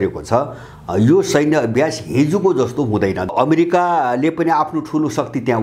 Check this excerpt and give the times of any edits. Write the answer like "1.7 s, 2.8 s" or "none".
3.3 s